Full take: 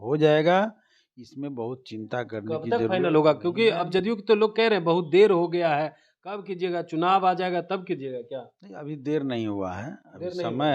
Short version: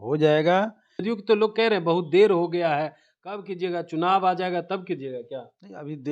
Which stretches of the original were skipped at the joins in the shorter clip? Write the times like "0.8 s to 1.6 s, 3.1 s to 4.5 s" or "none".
1.0 s to 4.0 s